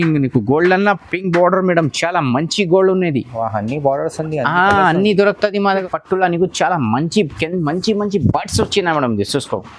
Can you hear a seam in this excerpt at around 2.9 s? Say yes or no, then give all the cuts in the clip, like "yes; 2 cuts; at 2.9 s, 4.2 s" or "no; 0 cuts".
no; 1 cut; at 5.8 s